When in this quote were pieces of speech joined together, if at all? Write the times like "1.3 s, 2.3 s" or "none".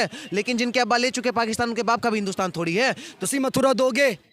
3.3 s